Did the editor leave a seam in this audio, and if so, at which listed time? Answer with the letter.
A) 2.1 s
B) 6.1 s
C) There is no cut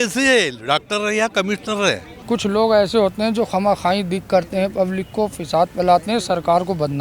A